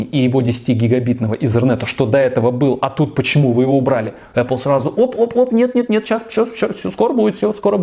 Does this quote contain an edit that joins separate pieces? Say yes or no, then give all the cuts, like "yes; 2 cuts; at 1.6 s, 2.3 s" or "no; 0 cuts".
no; 0 cuts